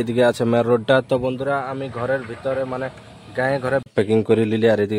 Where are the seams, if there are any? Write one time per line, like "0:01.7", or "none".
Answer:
0:03.9